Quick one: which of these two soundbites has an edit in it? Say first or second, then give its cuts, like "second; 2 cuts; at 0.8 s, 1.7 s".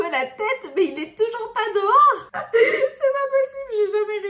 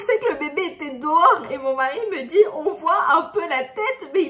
first; 1 cut; at 2.3 s